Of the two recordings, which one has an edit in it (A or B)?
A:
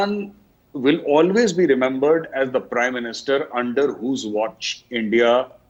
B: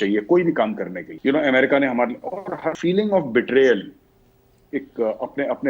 B